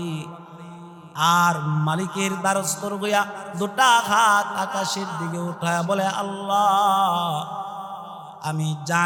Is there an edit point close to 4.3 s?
no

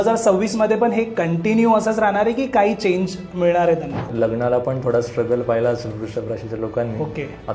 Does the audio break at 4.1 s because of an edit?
yes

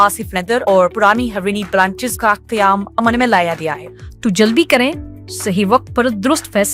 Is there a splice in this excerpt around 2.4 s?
no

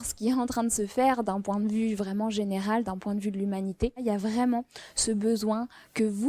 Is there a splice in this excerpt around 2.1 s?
no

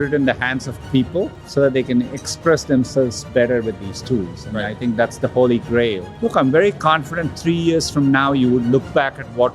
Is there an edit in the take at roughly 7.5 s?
no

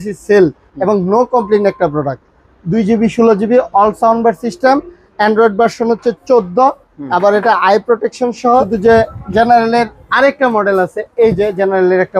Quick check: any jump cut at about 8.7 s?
yes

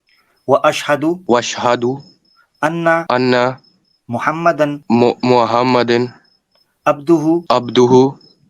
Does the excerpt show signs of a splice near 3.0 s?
yes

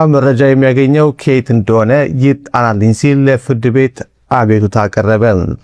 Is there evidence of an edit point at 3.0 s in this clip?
no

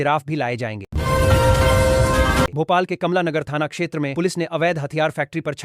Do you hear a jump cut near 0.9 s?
yes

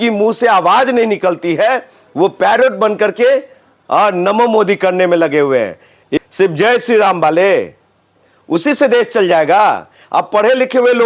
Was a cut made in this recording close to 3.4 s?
no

